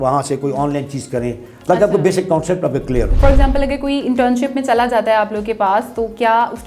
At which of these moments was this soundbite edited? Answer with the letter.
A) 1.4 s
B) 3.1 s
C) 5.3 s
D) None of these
B